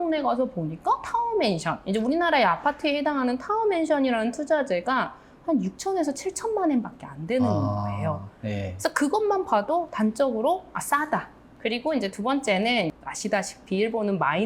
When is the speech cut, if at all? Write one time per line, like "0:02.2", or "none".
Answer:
0:11.5
0:12.9